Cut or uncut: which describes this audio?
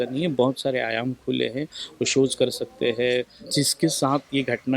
cut